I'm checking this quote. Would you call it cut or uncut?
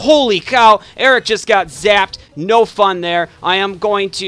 uncut